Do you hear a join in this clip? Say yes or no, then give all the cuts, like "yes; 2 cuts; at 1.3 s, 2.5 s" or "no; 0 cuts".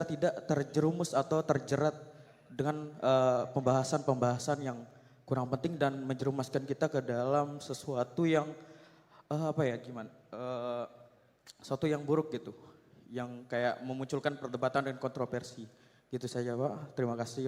no; 0 cuts